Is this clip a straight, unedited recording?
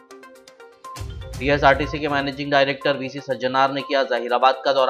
no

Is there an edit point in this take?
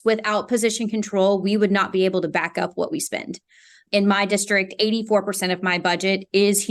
no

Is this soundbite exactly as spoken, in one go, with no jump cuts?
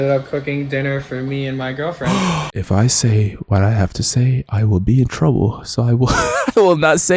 no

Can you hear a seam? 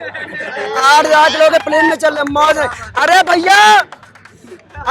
no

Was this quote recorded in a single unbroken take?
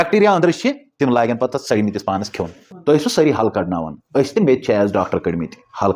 no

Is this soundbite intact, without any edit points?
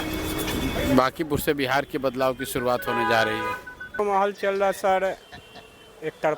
no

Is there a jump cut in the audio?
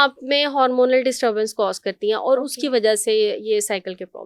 no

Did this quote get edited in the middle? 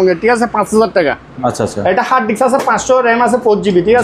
yes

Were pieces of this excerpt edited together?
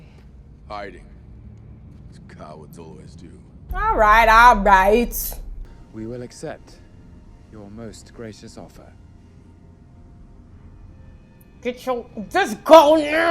no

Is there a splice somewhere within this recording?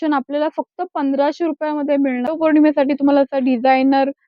yes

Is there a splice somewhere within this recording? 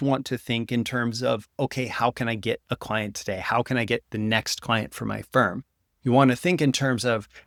no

